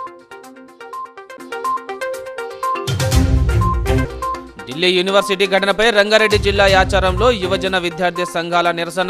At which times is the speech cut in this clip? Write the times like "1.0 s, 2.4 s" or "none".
none